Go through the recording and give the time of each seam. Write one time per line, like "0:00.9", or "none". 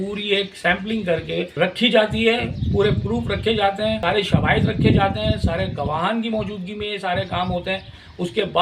0:01.5
0:04.0